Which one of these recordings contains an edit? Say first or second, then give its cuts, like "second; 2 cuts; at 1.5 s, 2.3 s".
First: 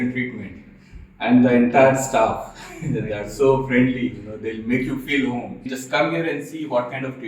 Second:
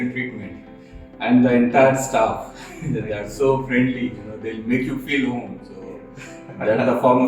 first; 1 cut; at 5.7 s